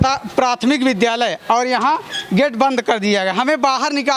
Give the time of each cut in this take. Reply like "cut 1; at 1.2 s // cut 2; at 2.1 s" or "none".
none